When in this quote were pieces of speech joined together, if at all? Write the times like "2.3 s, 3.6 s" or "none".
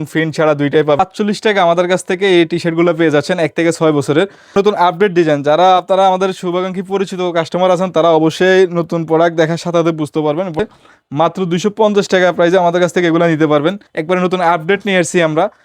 1.0 s, 4.5 s, 10.6 s, 13.9 s